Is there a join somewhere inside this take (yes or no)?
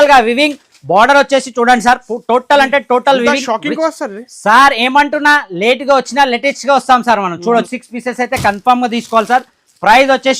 yes